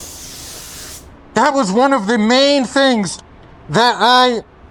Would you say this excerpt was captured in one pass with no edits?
yes; 0 cuts

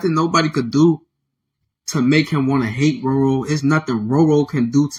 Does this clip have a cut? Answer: no; 0 cuts

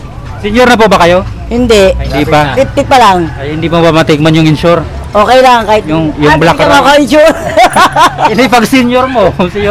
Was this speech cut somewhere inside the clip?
no; 0 cuts

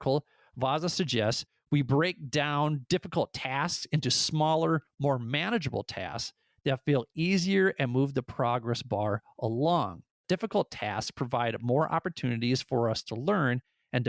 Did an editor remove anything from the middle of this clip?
yes; 1 cut; at 10.2 s

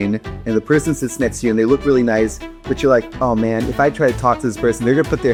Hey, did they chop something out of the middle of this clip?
no; 0 cuts

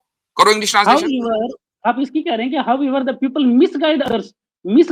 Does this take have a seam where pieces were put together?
no; 0 cuts

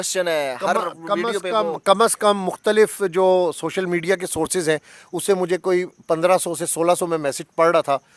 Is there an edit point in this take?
no; 0 cuts

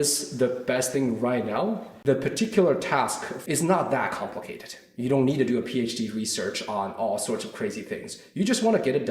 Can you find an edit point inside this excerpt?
yes; 2 cuts; at 1.9 s, 3.3 s

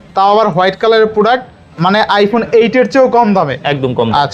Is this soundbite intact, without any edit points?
yes; 0 cuts

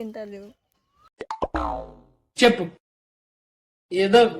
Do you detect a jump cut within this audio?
yes; 1 cut; at 1.1 s

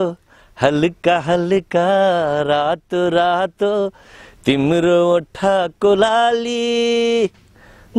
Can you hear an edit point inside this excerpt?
no; 0 cuts

